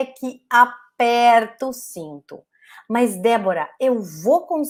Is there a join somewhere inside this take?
no; 0 cuts

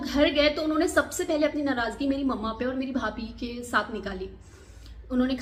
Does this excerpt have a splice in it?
no; 0 cuts

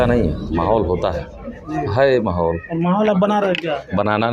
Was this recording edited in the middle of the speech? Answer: no; 0 cuts

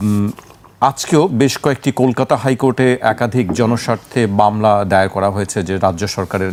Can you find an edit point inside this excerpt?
no; 0 cuts

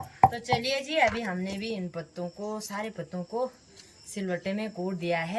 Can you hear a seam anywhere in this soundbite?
no; 0 cuts

